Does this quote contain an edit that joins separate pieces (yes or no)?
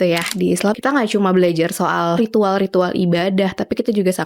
yes